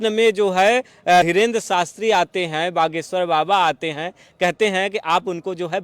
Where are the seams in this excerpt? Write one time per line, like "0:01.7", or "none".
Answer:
0:01.2